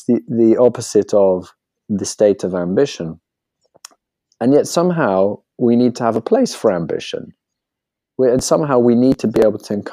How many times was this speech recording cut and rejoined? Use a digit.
0